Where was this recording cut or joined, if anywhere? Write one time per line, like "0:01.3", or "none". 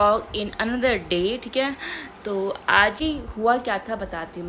0:03.0